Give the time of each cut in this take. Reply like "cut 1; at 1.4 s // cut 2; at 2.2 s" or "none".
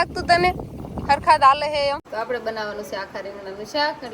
cut 1; at 2.1 s